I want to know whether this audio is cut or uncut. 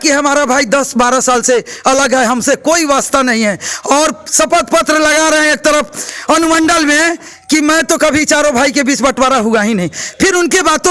uncut